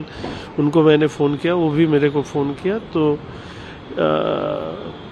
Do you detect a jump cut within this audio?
no; 0 cuts

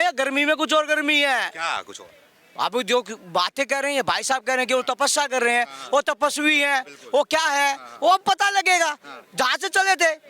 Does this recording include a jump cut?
no; 0 cuts

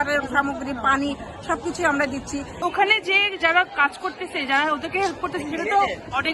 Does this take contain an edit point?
yes; 1 cut; at 2.6 s

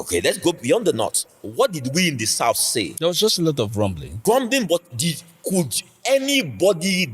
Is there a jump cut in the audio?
yes; 2 cuts; at 2.9 s, 4.1 s

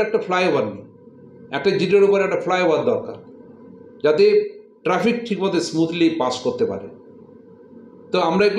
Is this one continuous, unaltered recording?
yes; 0 cuts

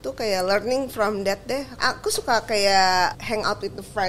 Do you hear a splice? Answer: yes; 2 cuts; at 1.8 s, 3.1 s

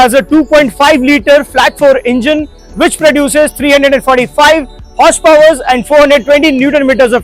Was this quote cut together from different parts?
no; 0 cuts

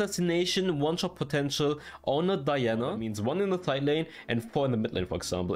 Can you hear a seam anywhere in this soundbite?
yes; 1 cut; at 3.1 s

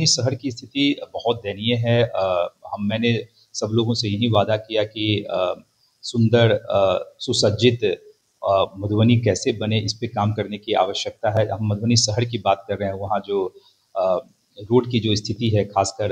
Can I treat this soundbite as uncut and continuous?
yes; 0 cuts

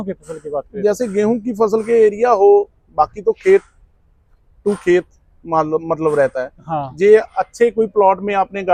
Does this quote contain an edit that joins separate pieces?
no; 0 cuts

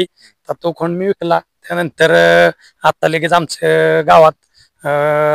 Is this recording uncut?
yes; 0 cuts

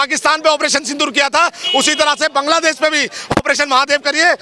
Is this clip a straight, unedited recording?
yes; 0 cuts

